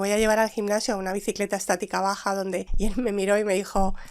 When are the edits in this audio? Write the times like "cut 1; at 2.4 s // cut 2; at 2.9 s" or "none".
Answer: cut 1; at 2.7 s